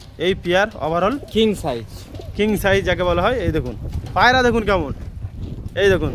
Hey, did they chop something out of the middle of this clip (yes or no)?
no